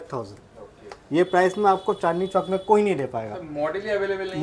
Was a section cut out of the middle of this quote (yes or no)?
no